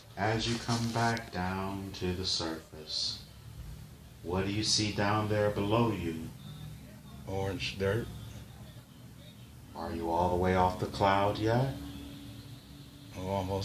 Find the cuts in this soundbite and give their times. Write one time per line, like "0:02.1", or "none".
0:10.2